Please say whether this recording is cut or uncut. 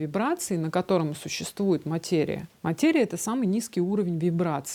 uncut